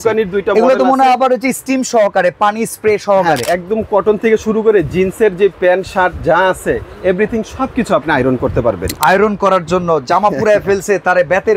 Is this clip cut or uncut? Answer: cut